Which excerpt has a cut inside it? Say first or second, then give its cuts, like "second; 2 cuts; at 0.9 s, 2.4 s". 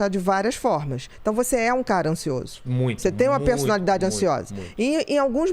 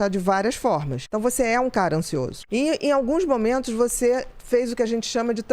second; 2 cuts; at 1.0 s, 2.4 s